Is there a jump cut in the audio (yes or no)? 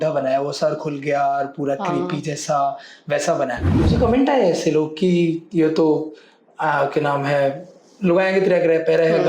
yes